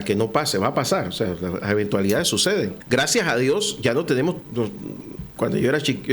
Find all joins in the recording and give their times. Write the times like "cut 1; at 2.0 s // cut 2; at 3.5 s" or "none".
cut 1; at 2.8 s // cut 2; at 4.5 s